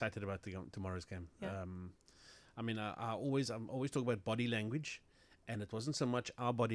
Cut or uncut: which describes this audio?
uncut